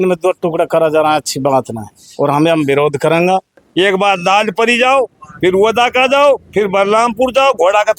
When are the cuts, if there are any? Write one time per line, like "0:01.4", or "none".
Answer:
0:03.6